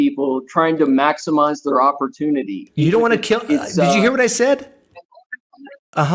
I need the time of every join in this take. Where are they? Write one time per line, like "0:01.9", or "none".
0:02.6